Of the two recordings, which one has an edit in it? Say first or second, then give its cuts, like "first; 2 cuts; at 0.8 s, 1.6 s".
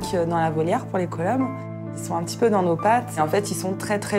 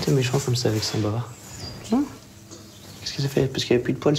first; 2 cuts; at 1.7 s, 3.2 s